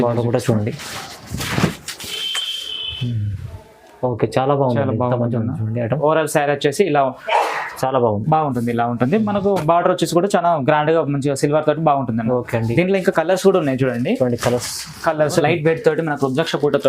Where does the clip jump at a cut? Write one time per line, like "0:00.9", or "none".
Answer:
0:06.0
0:15.4